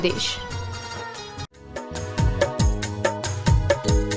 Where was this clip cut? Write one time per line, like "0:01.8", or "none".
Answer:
0:01.5